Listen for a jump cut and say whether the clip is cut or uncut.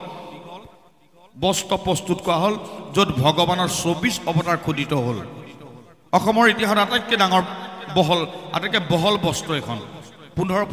uncut